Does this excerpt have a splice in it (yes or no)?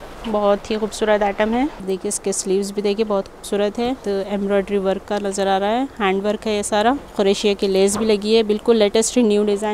yes